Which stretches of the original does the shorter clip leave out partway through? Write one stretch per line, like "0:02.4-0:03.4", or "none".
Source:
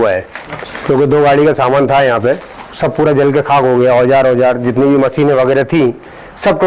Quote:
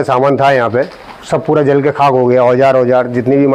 none

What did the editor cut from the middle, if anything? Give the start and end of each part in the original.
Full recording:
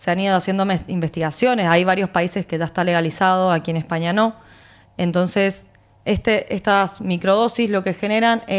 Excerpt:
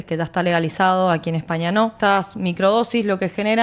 0:04.4-0:06.6

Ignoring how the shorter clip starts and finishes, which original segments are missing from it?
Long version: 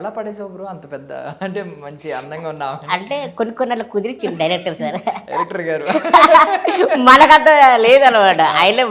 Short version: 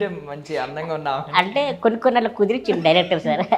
none

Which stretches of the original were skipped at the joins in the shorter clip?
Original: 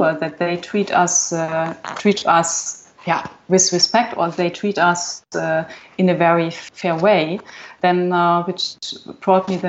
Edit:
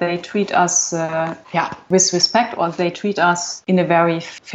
0:02.0-0:03.2
0:05.1-0:05.8

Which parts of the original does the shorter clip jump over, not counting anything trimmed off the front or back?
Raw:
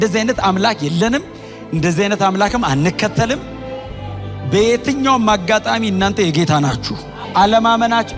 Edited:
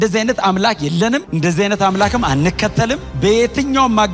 0:01.3-0:01.7
0:03.5-0:04.4

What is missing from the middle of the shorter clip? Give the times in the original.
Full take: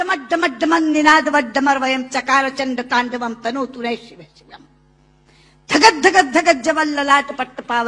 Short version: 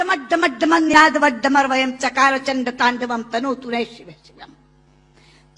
0:00.9-0:01.0

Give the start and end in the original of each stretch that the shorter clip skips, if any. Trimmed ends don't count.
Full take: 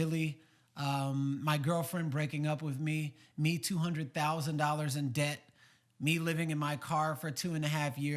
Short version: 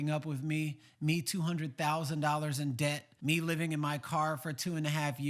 0:05.4-0:05.9

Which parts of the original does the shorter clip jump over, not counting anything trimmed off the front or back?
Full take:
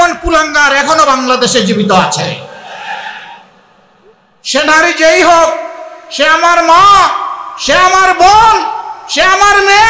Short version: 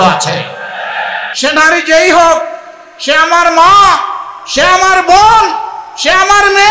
0:03.1-0:04.3

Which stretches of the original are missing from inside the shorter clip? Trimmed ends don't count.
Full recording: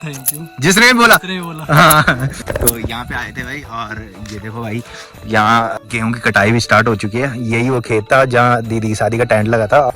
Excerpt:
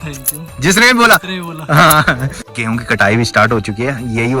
0:02.4-0:05.8

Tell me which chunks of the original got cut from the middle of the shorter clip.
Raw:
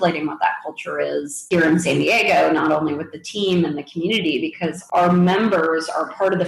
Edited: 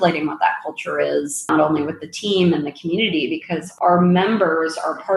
0:01.5-0:02.6

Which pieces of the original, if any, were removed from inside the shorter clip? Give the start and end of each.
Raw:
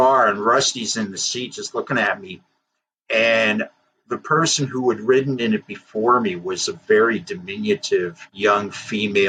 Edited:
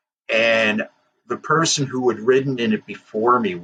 none

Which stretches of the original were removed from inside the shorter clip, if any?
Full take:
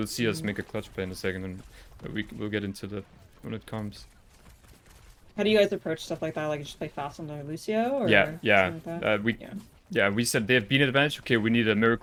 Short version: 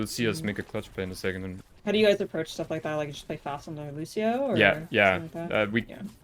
0:01.7-0:05.2

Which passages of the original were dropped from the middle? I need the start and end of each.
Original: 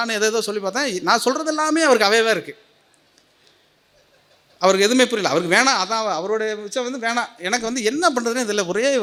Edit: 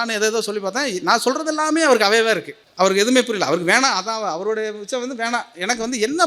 0:02.6-0:04.4

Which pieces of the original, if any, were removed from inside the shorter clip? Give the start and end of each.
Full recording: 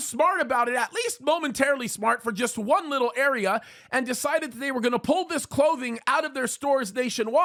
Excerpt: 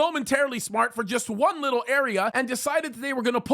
0:03.6-0:03.9

